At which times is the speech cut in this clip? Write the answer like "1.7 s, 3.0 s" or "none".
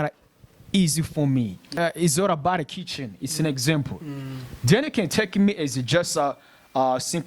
1.8 s